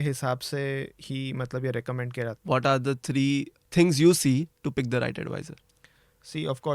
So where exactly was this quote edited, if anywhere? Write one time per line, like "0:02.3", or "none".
0:02.4
0:03.6